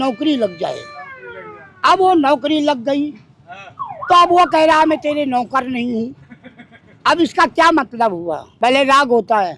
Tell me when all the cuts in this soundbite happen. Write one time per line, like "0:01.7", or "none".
0:08.4

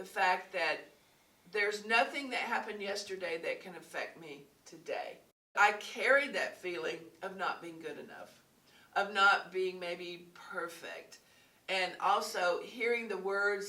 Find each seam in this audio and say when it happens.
0:05.5

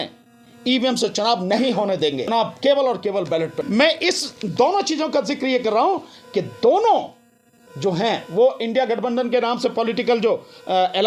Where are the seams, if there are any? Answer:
0:02.3
0:03.6

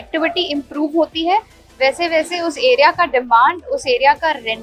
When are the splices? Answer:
none

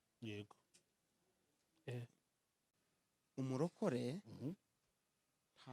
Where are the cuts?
0:02.6

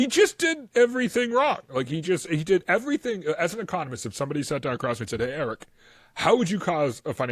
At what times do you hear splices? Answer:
none

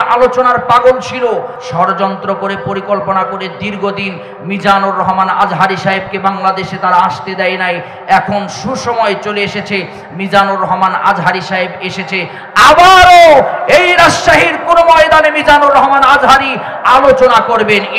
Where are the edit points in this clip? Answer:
0:01.6

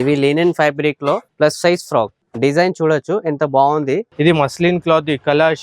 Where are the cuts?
0:01.3
0:02.2
0:04.1

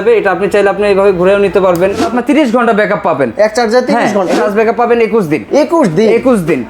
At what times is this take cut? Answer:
0:02.0
0:04.4

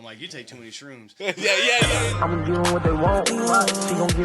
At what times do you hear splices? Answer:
0:01.8

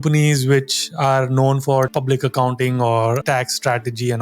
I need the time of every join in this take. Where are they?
0:01.9
0:03.2

